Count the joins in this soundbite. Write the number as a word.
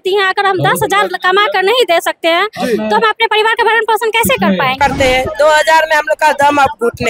one